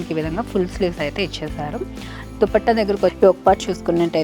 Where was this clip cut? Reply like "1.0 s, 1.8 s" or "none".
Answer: 3.1 s